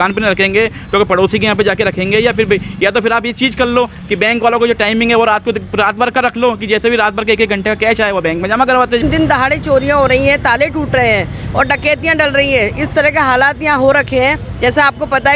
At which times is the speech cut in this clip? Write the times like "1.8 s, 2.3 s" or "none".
9.0 s